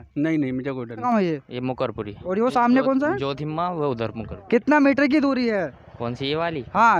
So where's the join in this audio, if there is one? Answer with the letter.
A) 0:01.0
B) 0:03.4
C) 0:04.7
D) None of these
A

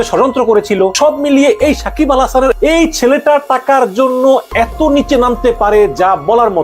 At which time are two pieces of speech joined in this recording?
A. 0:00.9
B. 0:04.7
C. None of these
A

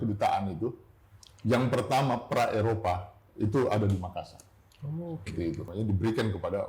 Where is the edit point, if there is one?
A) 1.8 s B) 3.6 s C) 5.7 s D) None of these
C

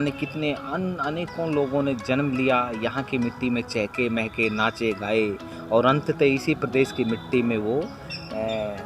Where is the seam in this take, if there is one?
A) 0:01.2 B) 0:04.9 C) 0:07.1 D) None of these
D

